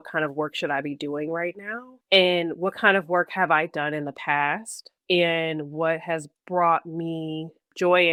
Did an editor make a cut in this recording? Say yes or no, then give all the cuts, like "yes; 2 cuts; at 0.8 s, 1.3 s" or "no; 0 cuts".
no; 0 cuts